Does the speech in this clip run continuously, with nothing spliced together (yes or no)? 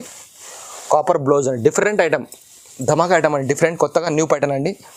yes